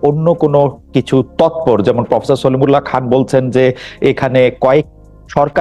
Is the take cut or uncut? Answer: uncut